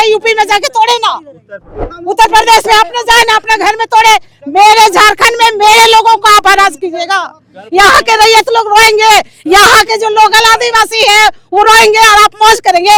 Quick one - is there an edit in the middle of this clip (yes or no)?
no